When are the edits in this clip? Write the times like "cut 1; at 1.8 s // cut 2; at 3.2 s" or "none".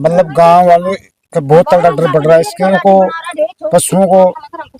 cut 1; at 2.7 s